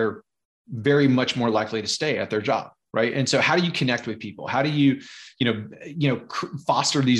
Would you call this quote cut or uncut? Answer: uncut